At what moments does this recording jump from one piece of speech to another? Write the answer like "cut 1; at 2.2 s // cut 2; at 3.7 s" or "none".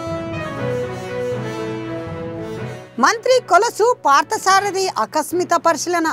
cut 1; at 2.4 s